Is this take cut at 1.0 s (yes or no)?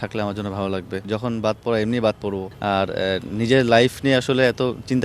yes